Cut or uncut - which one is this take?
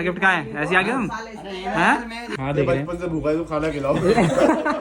cut